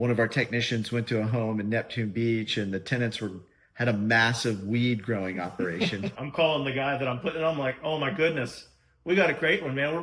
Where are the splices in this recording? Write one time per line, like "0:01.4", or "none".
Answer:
0:06.2